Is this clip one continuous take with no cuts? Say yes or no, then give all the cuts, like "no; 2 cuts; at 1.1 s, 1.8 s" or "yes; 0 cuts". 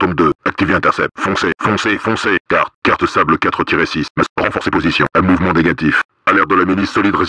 no; 3 cuts; at 1.1 s, 2.4 s, 5.1 s